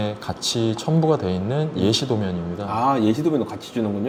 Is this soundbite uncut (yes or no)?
yes